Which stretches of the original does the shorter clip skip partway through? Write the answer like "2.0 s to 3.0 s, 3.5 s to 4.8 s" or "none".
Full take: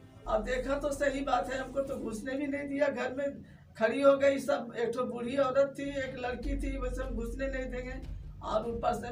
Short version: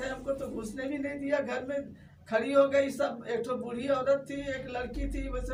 none